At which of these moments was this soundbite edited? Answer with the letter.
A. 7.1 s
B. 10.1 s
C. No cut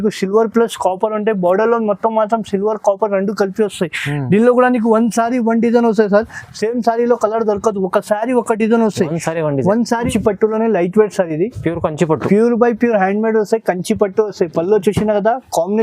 B